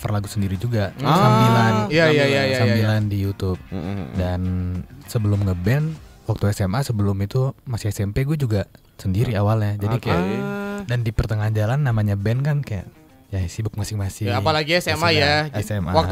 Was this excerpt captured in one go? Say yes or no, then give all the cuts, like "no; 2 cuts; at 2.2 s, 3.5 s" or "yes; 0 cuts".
yes; 0 cuts